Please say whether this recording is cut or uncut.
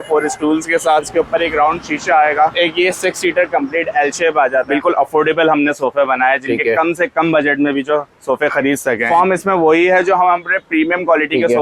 cut